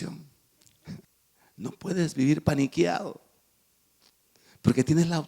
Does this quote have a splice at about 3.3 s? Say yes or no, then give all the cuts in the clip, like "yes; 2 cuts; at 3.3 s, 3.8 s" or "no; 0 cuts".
no; 1 cut; at 1.0 s